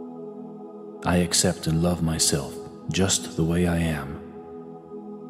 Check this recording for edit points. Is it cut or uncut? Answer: cut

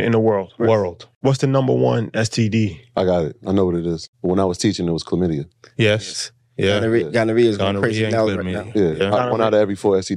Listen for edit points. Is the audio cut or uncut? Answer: cut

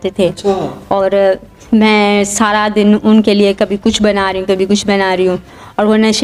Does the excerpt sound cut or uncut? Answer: uncut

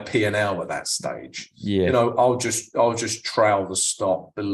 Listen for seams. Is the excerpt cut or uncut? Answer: uncut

